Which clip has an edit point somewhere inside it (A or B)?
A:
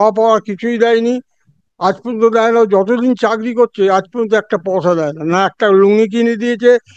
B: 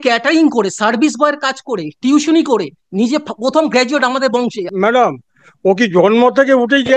B